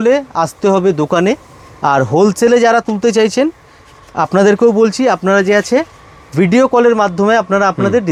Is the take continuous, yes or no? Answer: yes